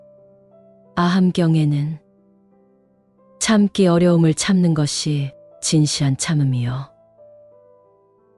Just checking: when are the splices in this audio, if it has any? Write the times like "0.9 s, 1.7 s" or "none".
0.9 s